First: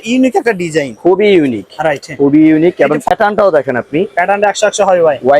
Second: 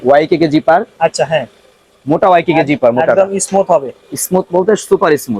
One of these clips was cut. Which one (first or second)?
first